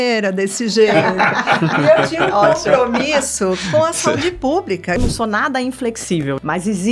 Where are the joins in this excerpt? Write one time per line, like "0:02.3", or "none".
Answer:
0:05.0